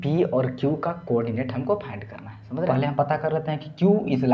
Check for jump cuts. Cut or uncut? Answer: cut